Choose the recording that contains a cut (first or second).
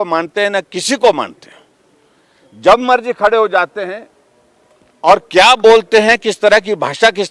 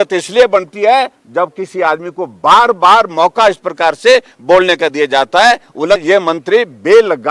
second